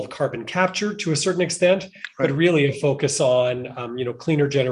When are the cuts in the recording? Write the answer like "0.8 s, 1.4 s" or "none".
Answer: none